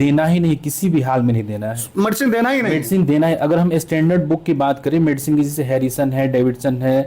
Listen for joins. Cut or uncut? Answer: uncut